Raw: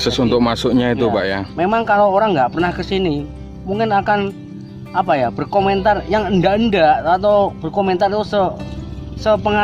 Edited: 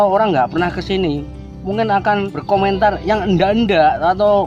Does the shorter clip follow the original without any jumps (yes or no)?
no